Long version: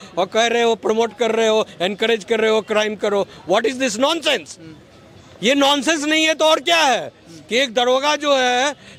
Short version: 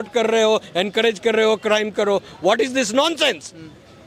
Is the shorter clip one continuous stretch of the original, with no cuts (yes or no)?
yes